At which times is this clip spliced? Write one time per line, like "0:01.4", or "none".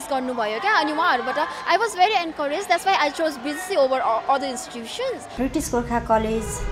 0:05.3